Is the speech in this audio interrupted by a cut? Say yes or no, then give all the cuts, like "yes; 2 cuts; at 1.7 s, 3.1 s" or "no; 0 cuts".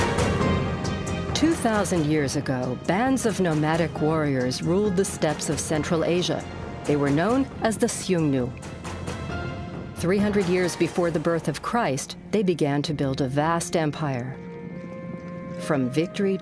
no; 0 cuts